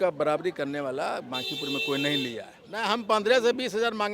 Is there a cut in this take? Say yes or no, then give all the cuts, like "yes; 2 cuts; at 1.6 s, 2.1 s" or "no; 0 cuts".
yes; 1 cut; at 2.6 s